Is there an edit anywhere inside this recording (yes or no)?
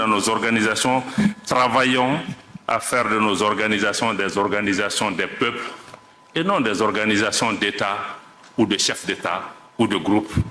no